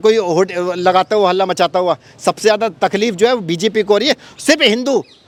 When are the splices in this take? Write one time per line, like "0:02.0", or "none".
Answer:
none